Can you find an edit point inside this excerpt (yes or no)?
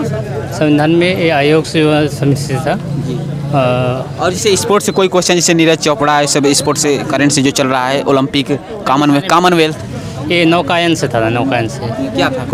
no